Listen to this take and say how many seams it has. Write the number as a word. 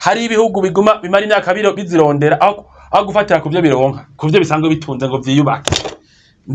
one